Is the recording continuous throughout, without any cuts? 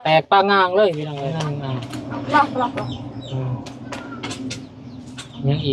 no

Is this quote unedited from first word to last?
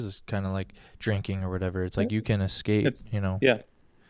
yes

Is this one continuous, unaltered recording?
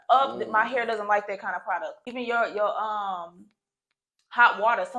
no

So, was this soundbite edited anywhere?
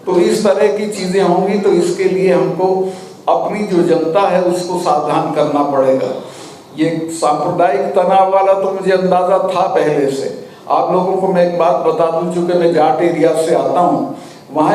no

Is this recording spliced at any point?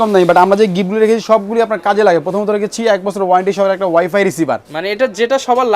no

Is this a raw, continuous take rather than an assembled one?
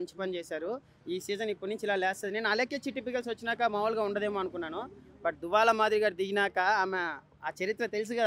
yes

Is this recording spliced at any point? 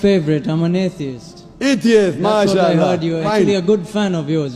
yes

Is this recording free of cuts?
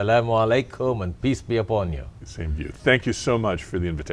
yes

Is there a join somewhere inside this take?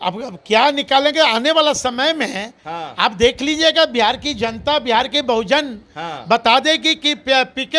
no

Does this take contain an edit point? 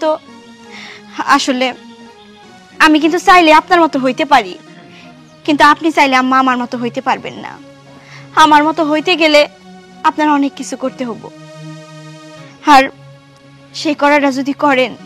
yes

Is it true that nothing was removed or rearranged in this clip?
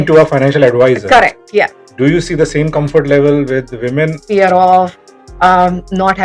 no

